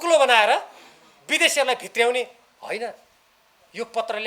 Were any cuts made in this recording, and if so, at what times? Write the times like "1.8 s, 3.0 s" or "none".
2.5 s